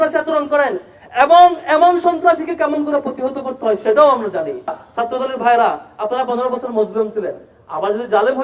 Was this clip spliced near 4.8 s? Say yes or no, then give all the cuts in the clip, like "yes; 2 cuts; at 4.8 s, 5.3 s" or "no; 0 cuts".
yes; 1 cut; at 4.8 s